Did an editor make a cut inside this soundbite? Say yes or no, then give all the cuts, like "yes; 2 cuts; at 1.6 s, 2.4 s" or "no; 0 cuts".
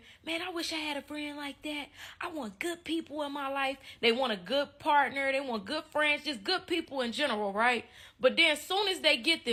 no; 0 cuts